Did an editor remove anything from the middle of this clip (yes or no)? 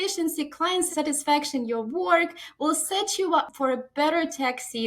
yes